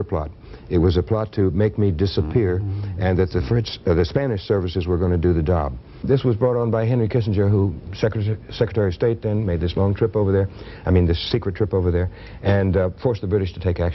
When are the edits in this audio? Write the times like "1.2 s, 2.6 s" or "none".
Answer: 6.0 s